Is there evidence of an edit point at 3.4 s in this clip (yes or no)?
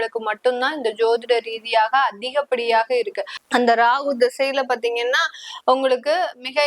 yes